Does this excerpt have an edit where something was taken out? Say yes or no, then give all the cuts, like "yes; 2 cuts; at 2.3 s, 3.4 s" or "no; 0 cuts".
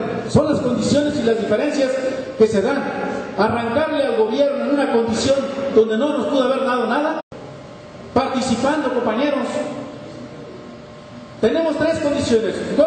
no; 0 cuts